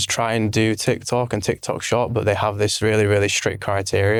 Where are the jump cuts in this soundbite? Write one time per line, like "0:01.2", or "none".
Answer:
none